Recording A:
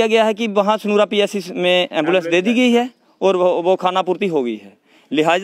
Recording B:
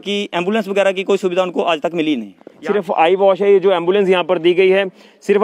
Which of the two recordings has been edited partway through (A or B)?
B